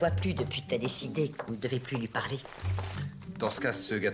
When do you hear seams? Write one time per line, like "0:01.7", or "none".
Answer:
0:02.9

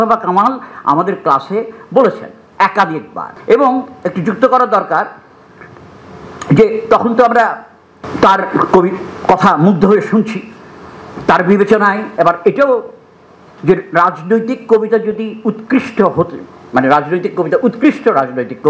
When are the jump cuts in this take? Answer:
none

